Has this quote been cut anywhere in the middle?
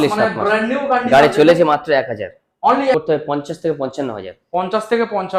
yes; 1 cut; at 2.9 s

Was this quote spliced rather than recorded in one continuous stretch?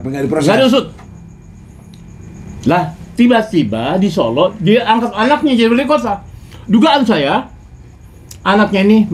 no; 0 cuts

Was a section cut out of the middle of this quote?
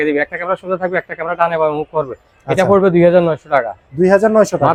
no; 0 cuts

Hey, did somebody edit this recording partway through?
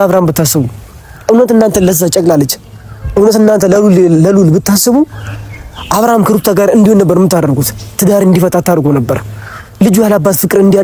no; 0 cuts

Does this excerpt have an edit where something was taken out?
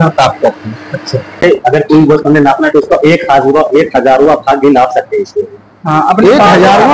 yes; 1 cut; at 1.4 s

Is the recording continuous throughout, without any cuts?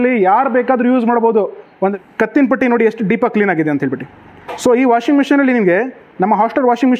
no; 1 cut; at 1.9 s

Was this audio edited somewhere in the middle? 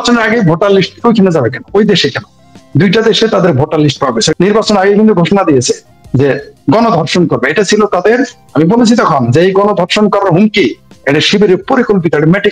yes; 1 cut; at 4.3 s

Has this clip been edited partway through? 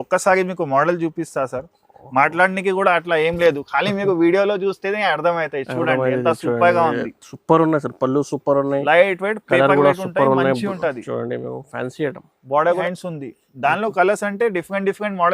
yes; 1 cut; at 12.8 s

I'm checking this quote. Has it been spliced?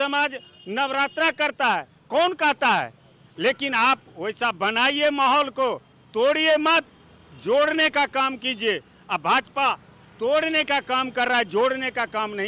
no; 0 cuts

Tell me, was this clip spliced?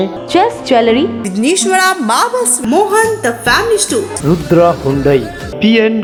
no; 0 cuts

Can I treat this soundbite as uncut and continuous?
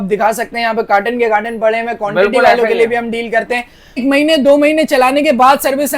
no; 1 cut; at 4.0 s

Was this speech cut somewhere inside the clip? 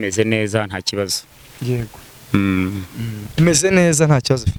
no; 0 cuts

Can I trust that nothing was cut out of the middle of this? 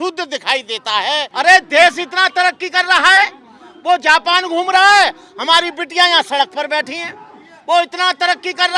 no; 1 cut; at 1.3 s

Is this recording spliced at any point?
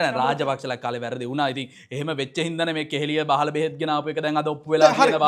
no; 0 cuts

